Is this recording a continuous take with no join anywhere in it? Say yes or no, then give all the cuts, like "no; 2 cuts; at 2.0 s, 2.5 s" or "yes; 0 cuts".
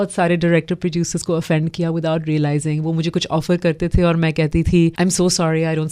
no; 1 cut; at 4.9 s